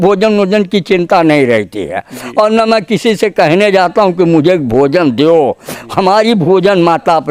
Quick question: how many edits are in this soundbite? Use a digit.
0